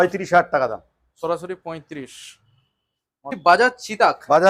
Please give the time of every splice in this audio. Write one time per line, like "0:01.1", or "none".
0:03.3